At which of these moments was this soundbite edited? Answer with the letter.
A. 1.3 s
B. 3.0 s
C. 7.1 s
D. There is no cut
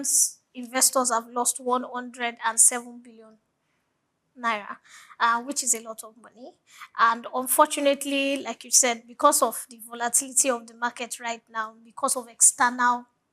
D